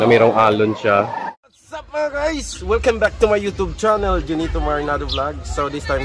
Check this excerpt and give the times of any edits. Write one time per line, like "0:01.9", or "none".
0:01.4

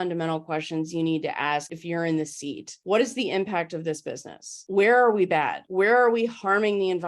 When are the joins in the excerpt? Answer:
0:01.7
0:02.7
0:04.6
0:05.6

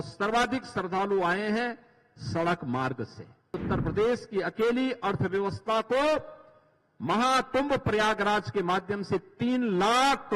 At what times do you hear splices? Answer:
0:03.6

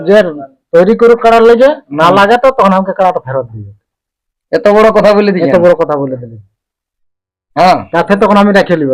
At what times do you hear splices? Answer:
none

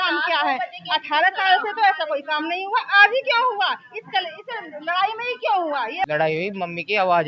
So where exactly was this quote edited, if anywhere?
0:06.1

